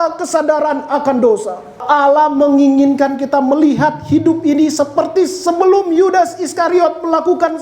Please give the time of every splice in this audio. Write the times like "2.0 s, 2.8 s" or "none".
1.8 s